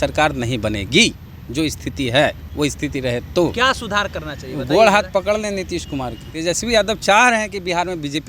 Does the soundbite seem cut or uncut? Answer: cut